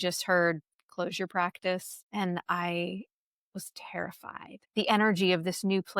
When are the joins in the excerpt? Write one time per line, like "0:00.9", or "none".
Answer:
0:02.0
0:04.6